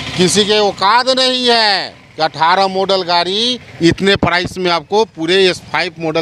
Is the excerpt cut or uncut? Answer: uncut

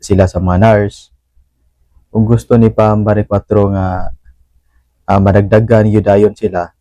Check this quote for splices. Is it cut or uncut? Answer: uncut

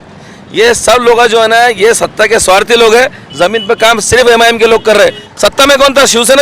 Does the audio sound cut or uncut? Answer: cut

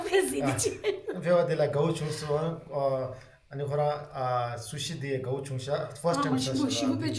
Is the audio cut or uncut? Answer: uncut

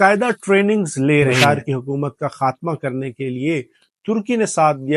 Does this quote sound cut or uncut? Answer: cut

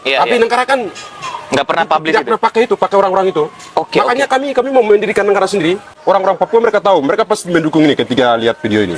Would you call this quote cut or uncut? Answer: cut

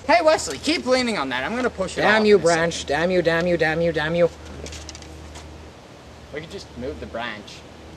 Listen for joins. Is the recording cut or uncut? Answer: uncut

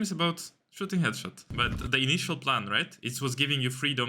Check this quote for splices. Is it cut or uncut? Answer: cut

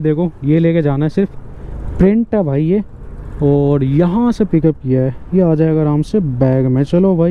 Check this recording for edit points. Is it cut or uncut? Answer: uncut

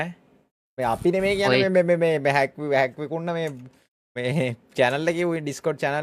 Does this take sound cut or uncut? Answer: uncut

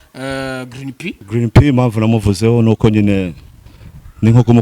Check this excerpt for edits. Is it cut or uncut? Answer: cut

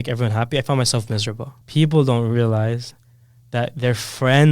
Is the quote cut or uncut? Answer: cut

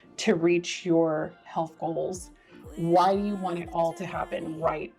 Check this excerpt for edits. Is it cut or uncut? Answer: uncut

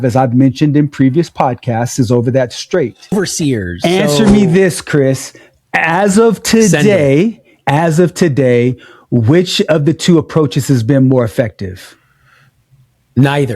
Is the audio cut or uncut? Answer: cut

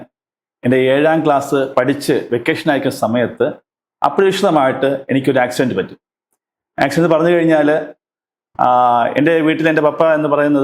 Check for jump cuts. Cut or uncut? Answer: uncut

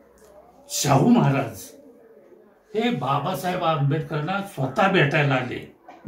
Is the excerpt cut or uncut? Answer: uncut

